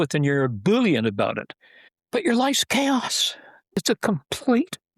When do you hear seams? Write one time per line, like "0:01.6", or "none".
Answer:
0:03.8